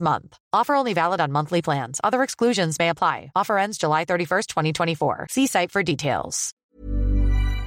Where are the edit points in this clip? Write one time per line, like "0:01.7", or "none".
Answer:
0:06.7